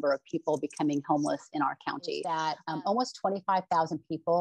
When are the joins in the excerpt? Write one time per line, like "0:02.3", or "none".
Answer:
0:02.2